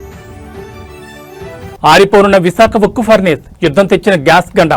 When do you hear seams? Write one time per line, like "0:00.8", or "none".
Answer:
0:01.1